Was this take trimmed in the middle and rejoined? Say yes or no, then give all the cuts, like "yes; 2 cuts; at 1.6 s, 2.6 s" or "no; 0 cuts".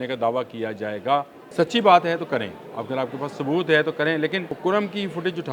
yes; 2 cuts; at 1.4 s, 4.5 s